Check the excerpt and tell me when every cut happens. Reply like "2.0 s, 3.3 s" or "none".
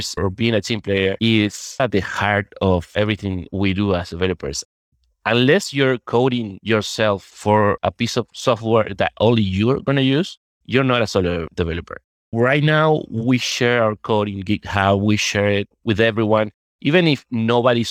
1.8 s, 4.9 s